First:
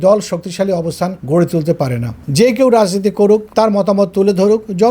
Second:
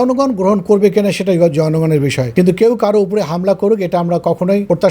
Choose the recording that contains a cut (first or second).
first